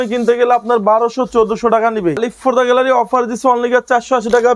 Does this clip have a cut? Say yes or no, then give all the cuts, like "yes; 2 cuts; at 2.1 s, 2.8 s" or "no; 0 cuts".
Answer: yes; 1 cut; at 2.2 s